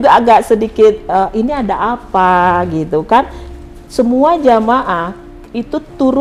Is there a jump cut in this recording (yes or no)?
no